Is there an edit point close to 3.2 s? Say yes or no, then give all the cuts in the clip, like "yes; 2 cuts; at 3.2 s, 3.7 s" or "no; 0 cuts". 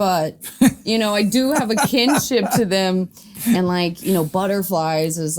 no; 0 cuts